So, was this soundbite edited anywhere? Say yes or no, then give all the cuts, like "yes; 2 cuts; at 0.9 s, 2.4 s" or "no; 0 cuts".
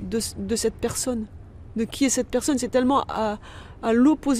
no; 0 cuts